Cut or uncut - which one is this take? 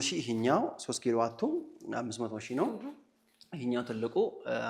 uncut